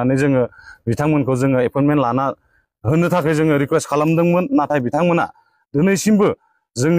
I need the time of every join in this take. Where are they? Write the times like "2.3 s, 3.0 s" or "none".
none